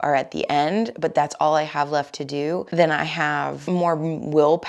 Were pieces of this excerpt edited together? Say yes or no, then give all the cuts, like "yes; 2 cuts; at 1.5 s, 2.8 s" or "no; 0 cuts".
yes; 2 cuts; at 2.7 s, 3.6 s